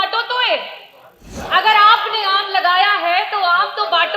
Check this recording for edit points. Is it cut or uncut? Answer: cut